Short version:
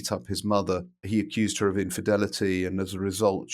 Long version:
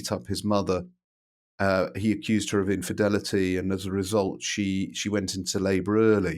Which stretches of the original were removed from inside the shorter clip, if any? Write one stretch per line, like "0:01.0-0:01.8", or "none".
0:01.0-0:01.9